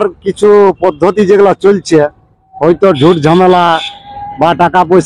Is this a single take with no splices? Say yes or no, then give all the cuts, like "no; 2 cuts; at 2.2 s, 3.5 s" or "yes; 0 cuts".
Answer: yes; 0 cuts